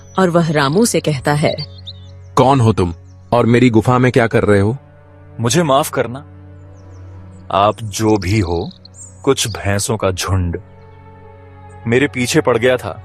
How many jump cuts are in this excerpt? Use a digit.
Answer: 0